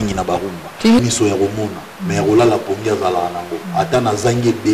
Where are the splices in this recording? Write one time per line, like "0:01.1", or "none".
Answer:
0:01.0